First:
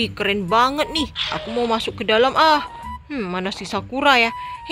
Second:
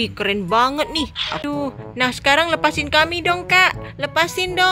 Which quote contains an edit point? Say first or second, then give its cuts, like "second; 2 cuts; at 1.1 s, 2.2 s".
second; 1 cut; at 1.4 s